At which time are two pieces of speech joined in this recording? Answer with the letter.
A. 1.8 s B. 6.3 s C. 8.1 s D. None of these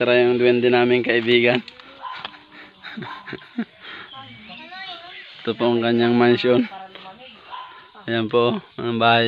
A